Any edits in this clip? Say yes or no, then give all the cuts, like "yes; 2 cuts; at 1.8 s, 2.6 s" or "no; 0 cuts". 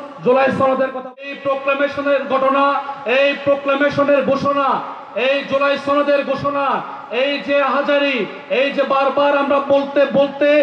yes; 1 cut; at 1.2 s